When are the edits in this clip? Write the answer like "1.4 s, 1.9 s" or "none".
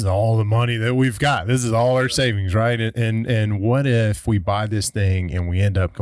none